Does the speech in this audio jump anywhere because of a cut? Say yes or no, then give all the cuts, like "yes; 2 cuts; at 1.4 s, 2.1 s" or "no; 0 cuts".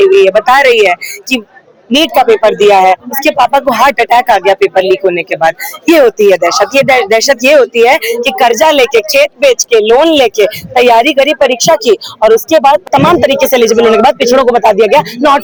no; 0 cuts